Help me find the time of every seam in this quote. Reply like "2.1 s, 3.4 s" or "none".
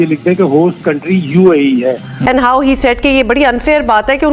2.1 s

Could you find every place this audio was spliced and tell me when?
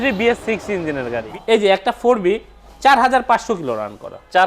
1.3 s

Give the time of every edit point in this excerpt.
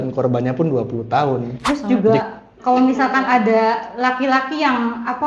1.5 s

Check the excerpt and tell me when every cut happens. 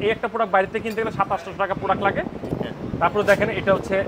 2.4 s

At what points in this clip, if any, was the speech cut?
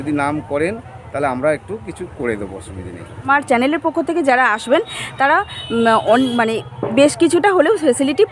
3.3 s

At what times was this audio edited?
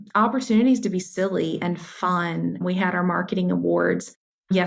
none

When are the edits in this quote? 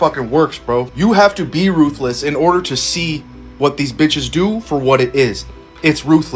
none

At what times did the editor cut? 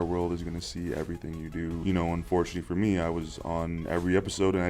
1.8 s

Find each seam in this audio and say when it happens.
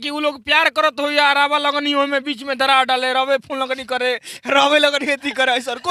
none

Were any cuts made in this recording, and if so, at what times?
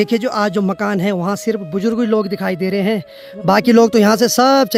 none

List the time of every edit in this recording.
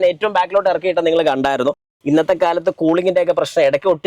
1.9 s

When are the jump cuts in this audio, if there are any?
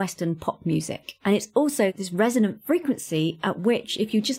1.9 s

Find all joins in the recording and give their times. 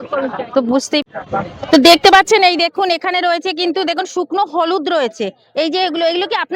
1.0 s

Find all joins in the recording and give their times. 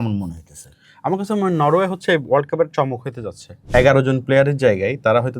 3.6 s

